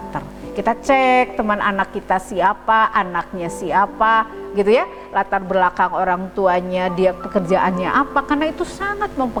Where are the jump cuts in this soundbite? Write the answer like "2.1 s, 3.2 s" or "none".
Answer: none